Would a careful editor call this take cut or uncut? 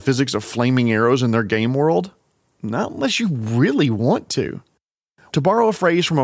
cut